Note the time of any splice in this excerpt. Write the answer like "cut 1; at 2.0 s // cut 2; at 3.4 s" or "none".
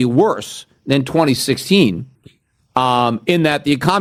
none